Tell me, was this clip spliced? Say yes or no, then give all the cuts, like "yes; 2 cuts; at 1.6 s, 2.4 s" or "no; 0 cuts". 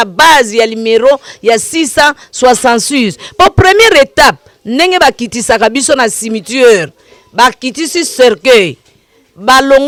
no; 0 cuts